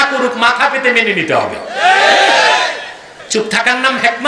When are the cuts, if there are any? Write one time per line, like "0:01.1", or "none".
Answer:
0:03.1